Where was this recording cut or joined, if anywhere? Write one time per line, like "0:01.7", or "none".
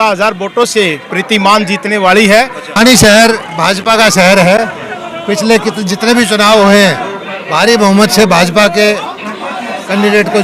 0:02.6